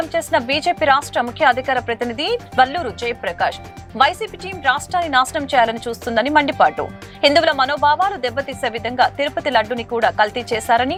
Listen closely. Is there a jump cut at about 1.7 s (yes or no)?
no